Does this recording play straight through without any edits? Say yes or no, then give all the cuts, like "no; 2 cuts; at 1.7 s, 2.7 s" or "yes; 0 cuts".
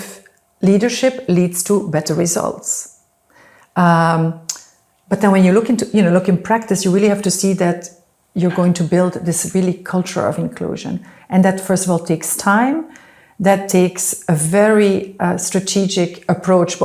yes; 0 cuts